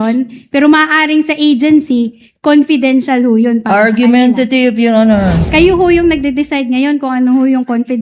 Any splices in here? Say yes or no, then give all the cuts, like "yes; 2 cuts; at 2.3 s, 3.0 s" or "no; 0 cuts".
yes; 1 cut; at 5.4 s